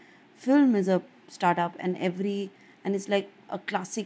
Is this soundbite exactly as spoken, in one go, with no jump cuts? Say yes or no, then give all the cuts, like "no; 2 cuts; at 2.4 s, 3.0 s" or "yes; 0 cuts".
yes; 0 cuts